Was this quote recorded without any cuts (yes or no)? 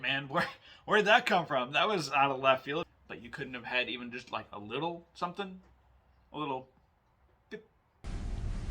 no